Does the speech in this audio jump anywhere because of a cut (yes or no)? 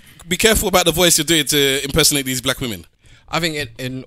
yes